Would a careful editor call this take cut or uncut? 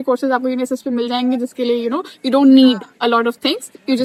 uncut